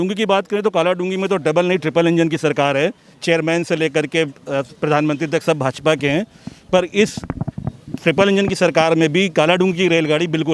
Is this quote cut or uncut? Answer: uncut